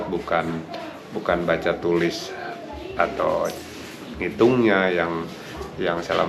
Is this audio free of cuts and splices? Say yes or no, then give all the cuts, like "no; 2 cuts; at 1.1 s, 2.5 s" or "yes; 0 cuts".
yes; 0 cuts